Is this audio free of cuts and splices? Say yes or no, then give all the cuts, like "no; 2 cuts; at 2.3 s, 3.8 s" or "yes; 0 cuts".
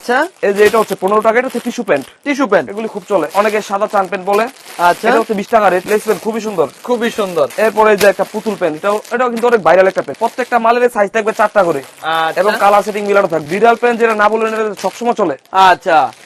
no; 5 cuts; at 3.3 s, 5.8 s, 7.5 s, 10.2 s, 13.4 s